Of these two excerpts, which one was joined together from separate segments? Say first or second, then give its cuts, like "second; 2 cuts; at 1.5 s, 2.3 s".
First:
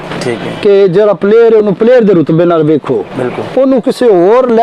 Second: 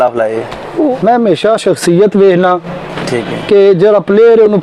second; 1 cut; at 0.9 s